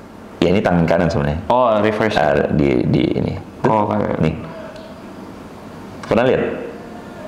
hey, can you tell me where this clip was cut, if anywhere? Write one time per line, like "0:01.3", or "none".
none